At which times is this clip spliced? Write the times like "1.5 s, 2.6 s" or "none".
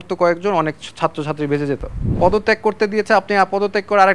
2.0 s

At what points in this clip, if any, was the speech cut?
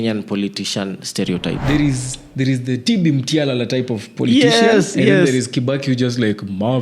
1.6 s

